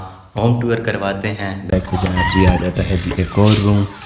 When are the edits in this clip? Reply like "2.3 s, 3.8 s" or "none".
1.7 s